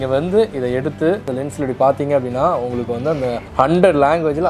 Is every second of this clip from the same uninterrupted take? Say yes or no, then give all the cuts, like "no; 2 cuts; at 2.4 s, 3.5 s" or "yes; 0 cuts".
no; 1 cut; at 1.3 s